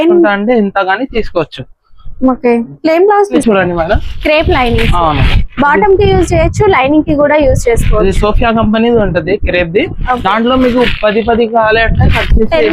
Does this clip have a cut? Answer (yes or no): yes